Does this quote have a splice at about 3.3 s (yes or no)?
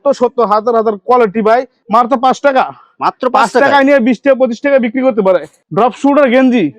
no